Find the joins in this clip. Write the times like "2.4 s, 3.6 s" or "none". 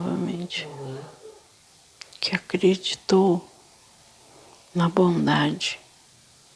1.5 s